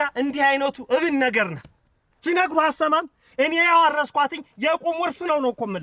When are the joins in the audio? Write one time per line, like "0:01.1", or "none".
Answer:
none